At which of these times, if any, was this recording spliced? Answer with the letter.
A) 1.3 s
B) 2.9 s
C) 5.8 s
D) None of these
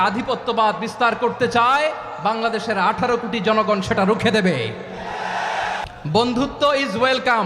C